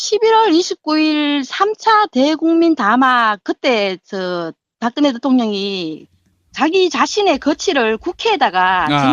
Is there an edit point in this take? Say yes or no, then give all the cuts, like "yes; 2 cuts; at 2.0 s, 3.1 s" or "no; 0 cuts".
yes; 1 cut; at 5.9 s